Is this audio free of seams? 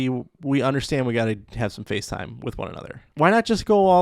no; 1 cut; at 2.9 s

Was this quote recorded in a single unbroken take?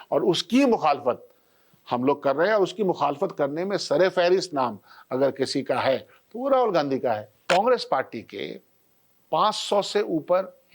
no; 1 cut; at 7.3 s

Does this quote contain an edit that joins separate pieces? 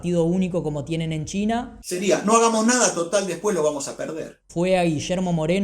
yes; 2 cuts; at 1.8 s, 4.4 s

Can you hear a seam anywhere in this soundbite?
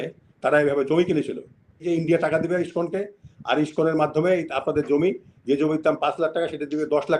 yes; 1 cut; at 1.8 s

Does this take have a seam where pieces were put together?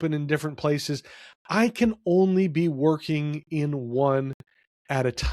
no; 0 cuts

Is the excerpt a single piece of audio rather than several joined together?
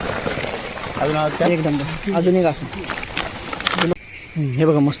no; 1 cut; at 3.9 s

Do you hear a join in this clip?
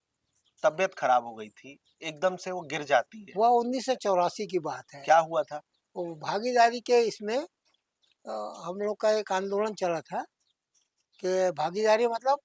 no; 0 cuts

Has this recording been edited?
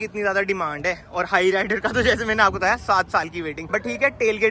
no; 0 cuts

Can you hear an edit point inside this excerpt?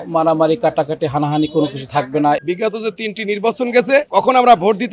yes; 1 cut; at 2.4 s

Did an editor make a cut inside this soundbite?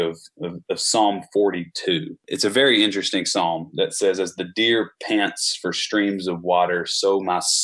yes; 1 cut; at 2.3 s

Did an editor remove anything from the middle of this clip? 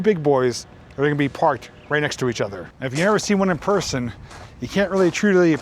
yes; 1 cut; at 2.7 s

